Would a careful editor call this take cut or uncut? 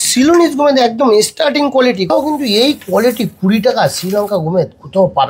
cut